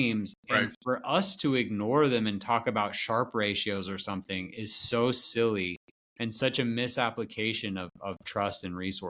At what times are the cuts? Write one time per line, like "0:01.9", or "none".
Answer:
none